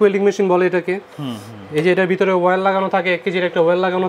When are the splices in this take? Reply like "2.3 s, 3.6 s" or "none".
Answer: none

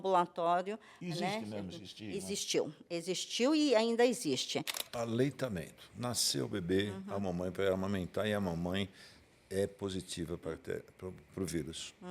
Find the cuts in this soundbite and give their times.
4.8 s

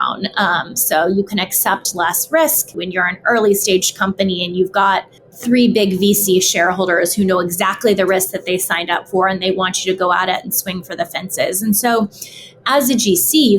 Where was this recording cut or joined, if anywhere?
2.7 s

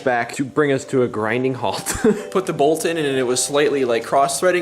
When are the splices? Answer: 2.3 s

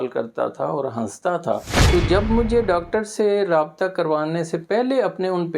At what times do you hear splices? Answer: 1.7 s

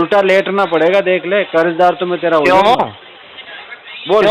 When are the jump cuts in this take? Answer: none

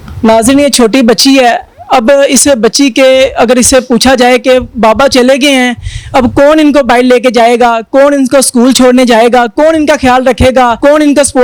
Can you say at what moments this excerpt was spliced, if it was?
none

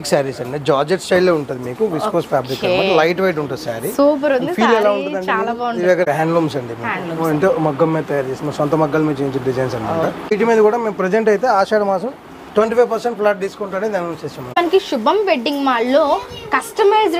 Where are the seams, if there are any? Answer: 6.1 s, 10.3 s, 14.6 s

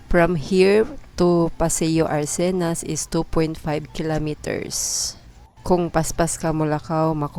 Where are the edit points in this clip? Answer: none

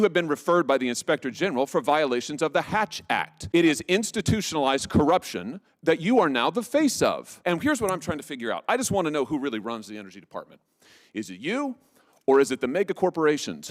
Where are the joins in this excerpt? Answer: 3.4 s, 7.3 s

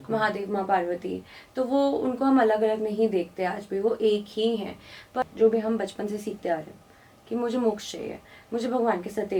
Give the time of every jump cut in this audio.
5.2 s

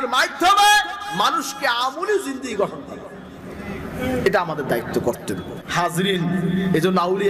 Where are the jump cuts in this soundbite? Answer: 5.6 s

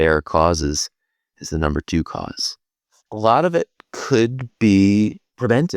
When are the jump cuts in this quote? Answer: 2.7 s

